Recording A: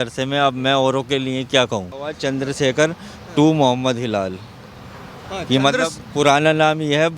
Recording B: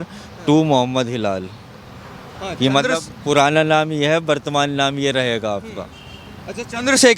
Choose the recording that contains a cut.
A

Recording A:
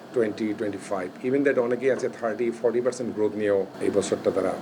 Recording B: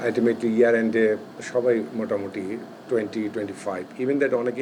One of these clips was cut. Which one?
A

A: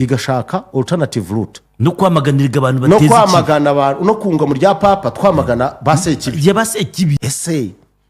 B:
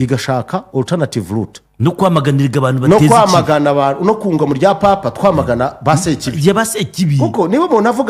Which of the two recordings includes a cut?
A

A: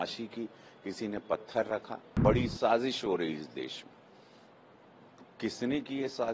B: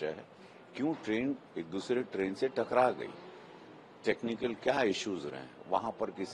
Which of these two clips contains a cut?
A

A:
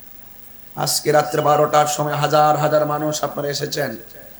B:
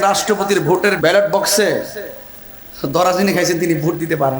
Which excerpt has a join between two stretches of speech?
B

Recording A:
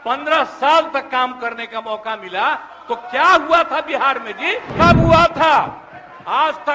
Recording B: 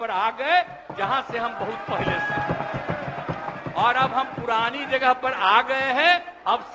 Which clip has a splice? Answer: A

